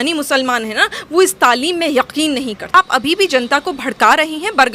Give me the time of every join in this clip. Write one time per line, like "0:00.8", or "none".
0:02.7